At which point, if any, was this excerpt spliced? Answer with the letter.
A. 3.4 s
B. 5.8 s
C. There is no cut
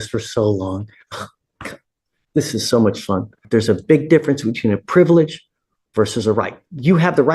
A